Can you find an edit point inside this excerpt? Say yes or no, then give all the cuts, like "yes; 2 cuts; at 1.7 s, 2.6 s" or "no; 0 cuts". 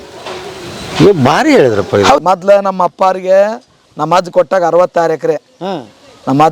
yes; 1 cut; at 2.2 s